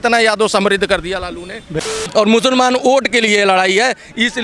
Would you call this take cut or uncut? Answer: cut